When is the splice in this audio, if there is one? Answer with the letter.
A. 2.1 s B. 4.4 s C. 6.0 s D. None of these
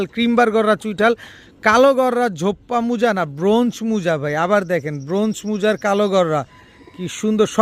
D